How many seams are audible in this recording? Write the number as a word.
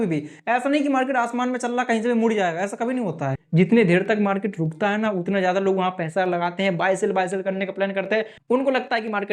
two